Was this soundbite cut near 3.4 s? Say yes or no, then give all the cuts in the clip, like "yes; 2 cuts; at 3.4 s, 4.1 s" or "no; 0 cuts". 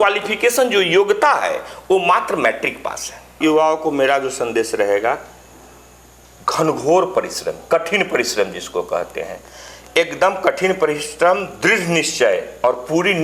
yes; 1 cut; at 3.4 s